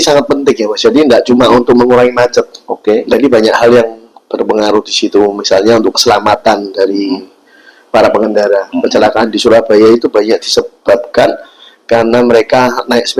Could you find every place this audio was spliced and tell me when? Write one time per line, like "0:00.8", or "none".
none